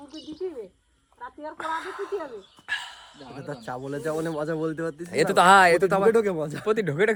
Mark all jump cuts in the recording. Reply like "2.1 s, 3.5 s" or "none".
none